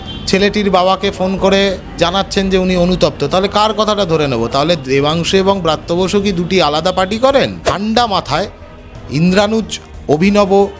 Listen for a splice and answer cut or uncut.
cut